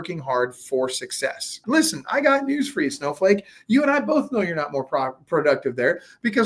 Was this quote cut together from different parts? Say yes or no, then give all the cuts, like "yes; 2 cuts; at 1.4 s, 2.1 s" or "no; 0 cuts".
yes; 1 cut; at 1.6 s